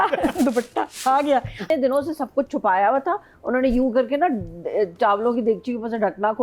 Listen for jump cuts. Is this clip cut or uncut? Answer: cut